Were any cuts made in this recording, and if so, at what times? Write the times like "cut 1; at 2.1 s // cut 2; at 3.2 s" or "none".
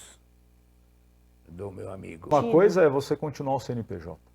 cut 1; at 2.3 s